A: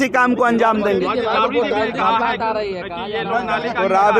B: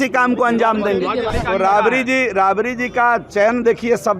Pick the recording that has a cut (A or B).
B